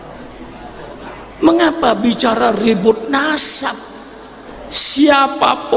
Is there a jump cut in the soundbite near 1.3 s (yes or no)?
no